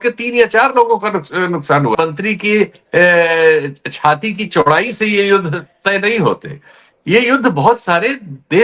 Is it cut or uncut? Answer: cut